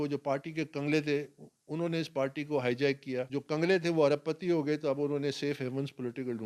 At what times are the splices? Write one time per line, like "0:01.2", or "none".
0:03.3